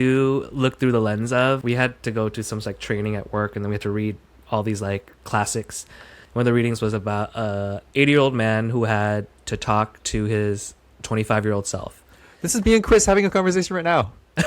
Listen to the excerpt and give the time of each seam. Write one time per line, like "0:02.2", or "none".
0:01.6